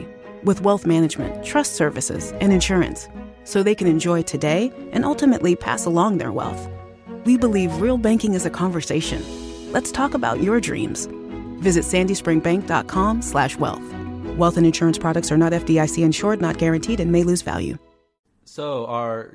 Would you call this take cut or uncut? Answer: cut